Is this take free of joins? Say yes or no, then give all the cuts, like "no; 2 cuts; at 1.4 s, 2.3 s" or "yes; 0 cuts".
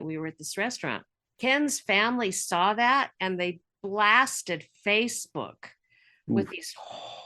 no; 1 cut; at 1.2 s